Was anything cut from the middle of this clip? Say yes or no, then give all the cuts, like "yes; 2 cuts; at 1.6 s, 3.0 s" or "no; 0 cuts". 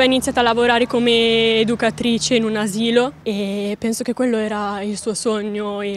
no; 0 cuts